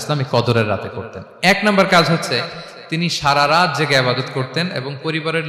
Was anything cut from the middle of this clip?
no; 0 cuts

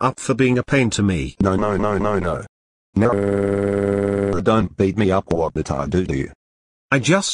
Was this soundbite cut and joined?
yes; 1 cut; at 1.3 s

